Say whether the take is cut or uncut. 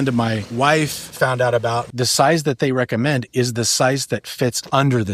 cut